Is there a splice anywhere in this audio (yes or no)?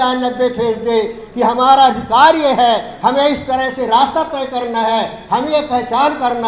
no